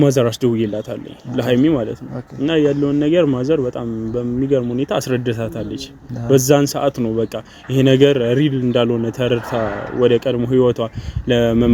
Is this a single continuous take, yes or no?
yes